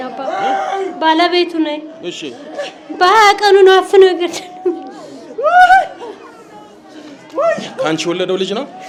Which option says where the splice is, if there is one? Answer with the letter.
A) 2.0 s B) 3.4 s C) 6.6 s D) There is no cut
D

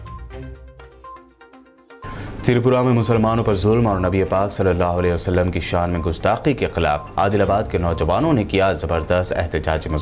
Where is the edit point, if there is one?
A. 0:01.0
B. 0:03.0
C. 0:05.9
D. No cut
A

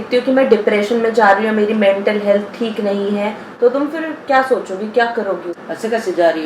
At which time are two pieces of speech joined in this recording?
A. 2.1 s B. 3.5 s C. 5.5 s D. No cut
C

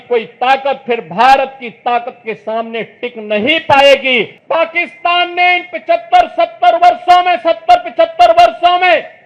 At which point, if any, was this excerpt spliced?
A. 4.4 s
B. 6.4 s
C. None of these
A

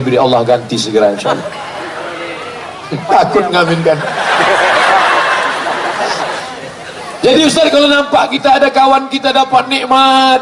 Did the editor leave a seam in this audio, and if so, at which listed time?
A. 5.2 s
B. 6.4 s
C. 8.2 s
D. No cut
B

